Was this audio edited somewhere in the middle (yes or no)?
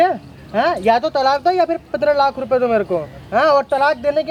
no